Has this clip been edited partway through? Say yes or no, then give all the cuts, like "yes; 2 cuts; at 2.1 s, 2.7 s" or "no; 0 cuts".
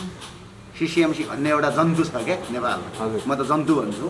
no; 0 cuts